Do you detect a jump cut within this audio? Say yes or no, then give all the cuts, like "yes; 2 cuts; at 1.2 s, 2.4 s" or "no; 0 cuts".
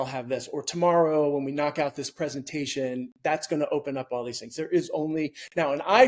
no; 0 cuts